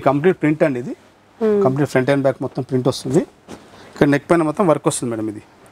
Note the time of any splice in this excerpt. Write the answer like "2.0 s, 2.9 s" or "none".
none

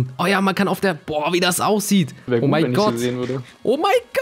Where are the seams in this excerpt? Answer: 2.2 s

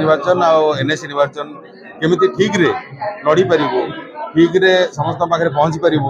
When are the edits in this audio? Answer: none

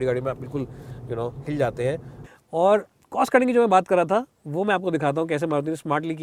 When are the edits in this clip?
2.2 s

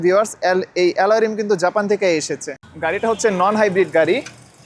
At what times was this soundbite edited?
2.4 s

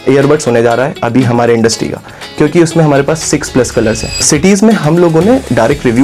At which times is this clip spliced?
4.3 s

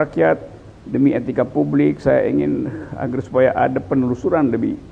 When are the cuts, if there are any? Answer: none

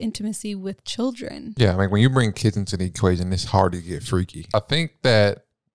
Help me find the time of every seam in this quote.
1.4 s, 4.5 s

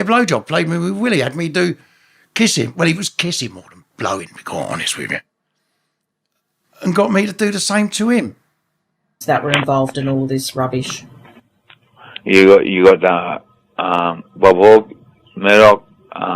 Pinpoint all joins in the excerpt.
9.2 s

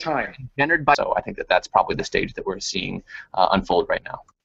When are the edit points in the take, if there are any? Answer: 0.9 s

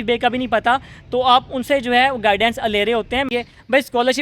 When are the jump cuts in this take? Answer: 3.3 s

